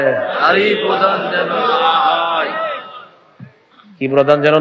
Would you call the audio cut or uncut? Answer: uncut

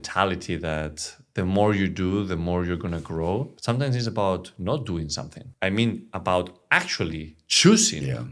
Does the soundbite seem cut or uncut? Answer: cut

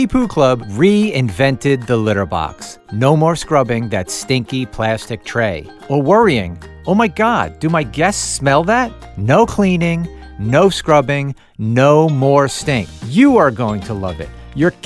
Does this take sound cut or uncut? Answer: cut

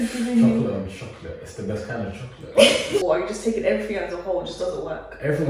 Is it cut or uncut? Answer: cut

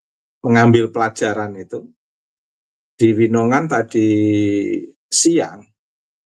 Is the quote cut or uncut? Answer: uncut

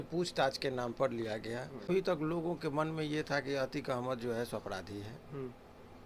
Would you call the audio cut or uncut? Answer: cut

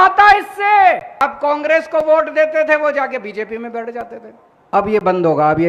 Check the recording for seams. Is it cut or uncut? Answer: cut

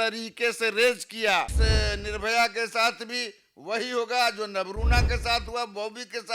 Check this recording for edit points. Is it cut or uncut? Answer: cut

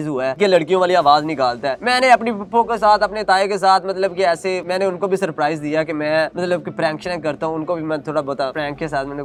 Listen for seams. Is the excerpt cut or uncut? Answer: uncut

